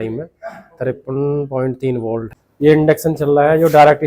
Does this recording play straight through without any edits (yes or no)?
no